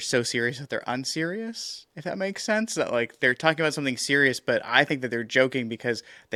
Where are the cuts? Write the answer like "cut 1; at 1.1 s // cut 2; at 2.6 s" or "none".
none